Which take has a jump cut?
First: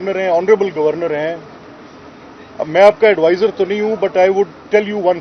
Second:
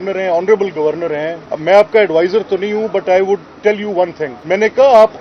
second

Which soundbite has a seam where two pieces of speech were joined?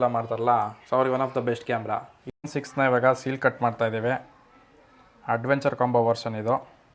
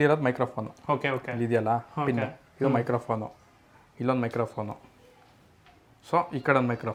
first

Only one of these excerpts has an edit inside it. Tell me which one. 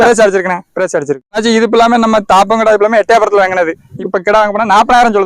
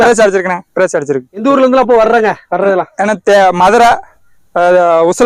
first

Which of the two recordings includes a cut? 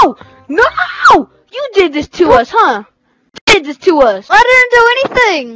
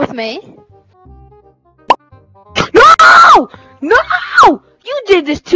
first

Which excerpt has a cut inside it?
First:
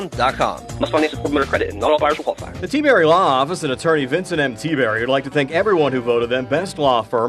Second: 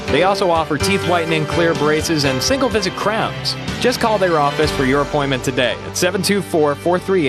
first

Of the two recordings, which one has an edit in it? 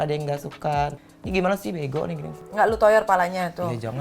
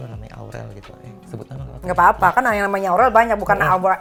first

